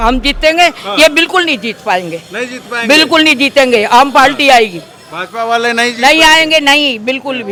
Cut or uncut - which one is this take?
uncut